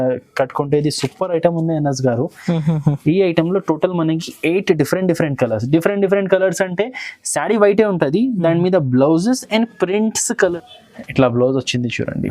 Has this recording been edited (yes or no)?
yes